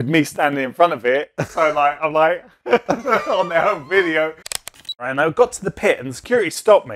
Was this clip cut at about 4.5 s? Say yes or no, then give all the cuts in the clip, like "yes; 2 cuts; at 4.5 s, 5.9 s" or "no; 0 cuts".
yes; 1 cut; at 4.5 s